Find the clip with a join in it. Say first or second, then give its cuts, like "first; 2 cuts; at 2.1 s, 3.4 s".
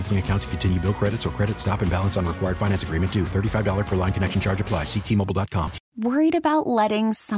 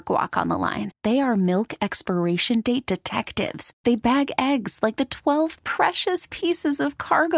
first; 1 cut; at 5.9 s